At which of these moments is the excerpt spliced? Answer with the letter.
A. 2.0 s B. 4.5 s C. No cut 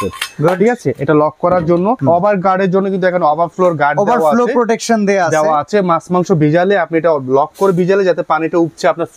A